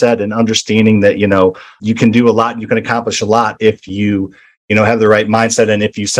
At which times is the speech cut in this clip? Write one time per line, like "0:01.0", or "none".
none